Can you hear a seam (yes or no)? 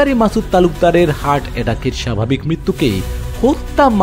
no